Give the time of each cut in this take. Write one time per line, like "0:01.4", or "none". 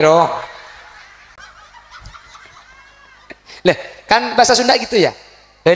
0:01.3

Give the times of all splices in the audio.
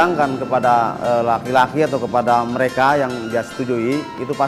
none

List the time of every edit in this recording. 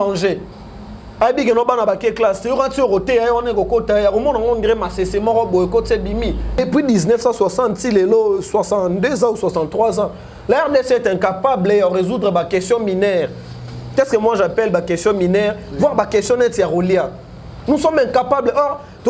0:06.6

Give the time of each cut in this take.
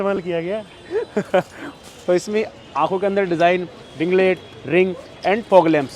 none

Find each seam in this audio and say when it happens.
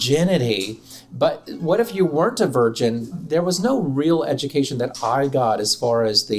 0:03.0

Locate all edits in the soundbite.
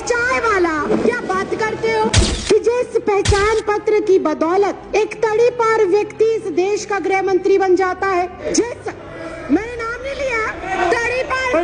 0:00.9
0:02.3
0:04.8
0:08.4
0:10.7

